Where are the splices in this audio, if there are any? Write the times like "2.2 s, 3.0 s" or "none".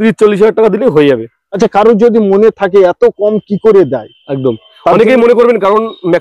1.4 s